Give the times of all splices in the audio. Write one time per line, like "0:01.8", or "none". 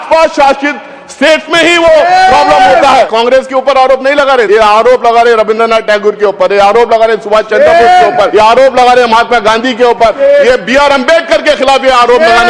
0:03.1
0:04.5
0:08.3
0:10.2